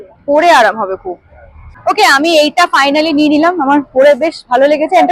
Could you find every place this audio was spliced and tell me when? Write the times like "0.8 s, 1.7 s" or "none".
1.7 s